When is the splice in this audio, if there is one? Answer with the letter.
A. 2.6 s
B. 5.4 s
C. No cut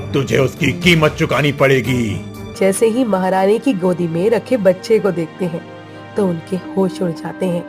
A